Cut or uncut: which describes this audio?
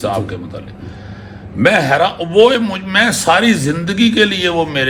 uncut